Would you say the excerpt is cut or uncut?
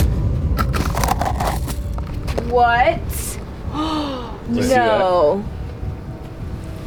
uncut